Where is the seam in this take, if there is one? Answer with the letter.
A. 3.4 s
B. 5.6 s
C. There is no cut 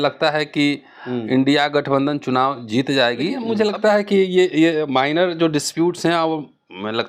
A